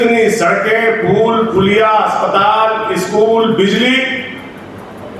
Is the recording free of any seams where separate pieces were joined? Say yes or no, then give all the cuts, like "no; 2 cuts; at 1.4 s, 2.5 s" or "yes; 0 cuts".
yes; 0 cuts